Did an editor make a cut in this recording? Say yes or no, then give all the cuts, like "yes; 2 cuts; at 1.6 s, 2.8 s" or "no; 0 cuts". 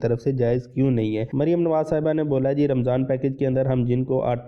yes; 1 cut; at 1.3 s